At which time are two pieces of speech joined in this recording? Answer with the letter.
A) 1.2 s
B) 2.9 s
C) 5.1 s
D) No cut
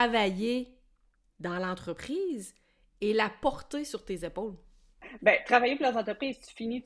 C